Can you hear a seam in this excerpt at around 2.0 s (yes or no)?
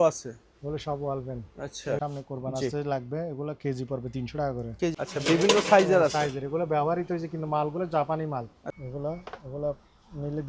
yes